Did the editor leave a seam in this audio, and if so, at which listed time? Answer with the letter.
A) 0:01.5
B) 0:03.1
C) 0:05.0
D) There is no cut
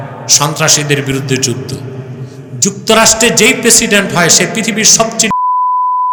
D